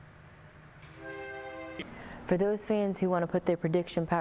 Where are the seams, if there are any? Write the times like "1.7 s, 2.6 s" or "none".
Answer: 1.8 s